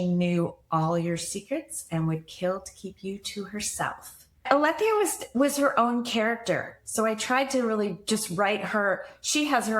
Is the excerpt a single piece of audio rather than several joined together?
no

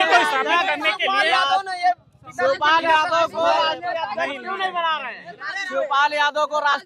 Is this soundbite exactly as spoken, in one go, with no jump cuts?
yes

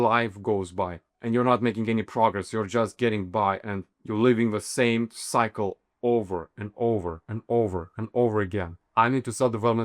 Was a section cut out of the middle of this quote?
yes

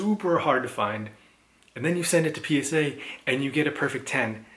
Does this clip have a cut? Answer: no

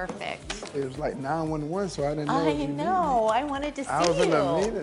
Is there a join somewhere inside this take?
no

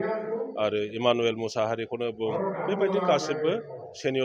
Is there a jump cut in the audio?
no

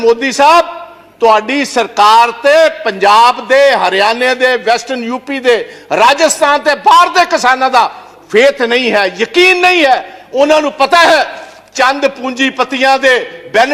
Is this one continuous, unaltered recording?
yes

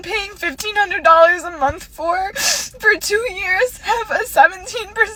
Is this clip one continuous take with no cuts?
yes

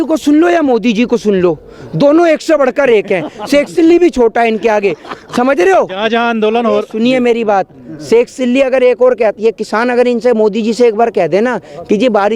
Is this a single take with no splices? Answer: yes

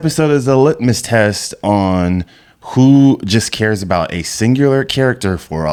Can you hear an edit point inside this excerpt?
no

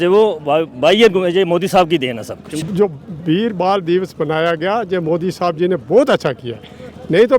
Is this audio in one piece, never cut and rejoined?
no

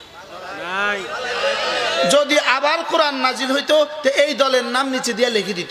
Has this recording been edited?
no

